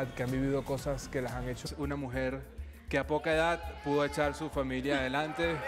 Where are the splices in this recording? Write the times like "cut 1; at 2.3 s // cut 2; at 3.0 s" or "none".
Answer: none